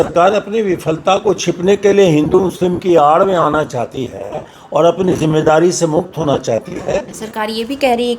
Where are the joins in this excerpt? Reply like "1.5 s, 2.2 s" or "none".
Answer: 7.2 s